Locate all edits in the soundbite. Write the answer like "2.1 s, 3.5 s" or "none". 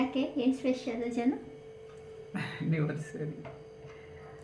none